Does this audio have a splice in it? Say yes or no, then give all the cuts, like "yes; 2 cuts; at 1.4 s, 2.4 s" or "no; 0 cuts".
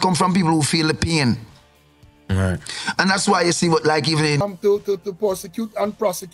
yes; 1 cut; at 4.4 s